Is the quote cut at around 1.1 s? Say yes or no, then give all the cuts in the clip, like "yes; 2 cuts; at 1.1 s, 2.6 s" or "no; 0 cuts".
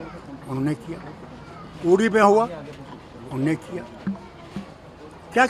no; 0 cuts